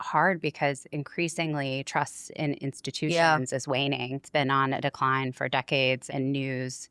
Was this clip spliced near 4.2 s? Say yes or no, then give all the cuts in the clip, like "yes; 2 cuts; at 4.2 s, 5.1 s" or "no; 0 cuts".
yes; 2 cuts; at 4.2 s, 6.0 s